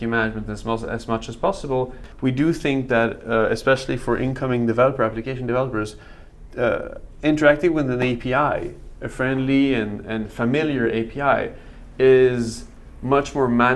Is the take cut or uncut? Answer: cut